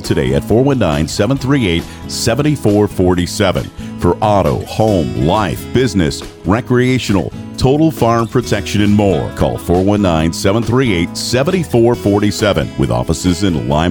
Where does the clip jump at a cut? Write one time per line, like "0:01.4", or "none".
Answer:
none